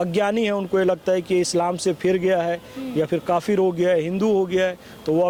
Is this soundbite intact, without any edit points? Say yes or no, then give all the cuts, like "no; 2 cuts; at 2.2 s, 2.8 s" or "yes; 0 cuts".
yes; 0 cuts